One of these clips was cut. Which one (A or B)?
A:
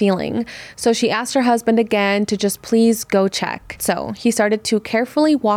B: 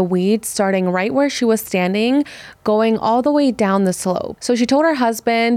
B